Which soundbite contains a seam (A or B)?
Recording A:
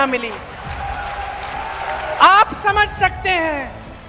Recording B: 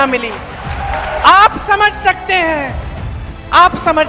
B